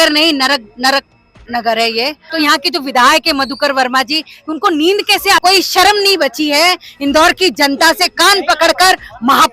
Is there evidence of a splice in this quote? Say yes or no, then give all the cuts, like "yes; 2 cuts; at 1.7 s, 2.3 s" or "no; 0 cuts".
yes; 2 cuts; at 2.2 s, 5.4 s